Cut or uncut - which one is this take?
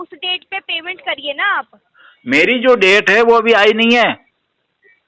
uncut